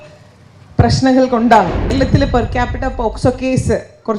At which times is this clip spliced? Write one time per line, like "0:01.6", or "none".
0:01.9